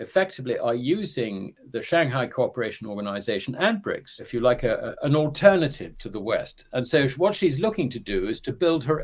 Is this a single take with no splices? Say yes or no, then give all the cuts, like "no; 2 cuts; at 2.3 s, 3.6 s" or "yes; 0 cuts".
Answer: yes; 0 cuts